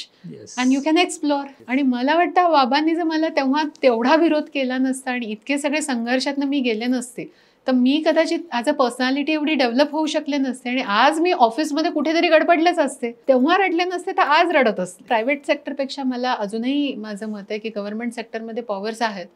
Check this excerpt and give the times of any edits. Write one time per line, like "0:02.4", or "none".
0:01.5
0:13.2
0:15.0